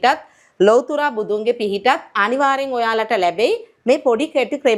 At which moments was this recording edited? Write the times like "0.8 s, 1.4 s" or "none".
none